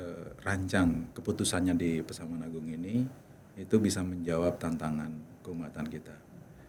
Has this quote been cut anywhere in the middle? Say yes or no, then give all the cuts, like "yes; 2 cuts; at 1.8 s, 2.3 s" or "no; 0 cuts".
no; 0 cuts